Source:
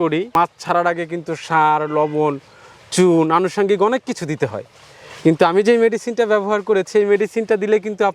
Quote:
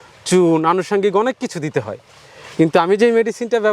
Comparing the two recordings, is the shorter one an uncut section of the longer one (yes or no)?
yes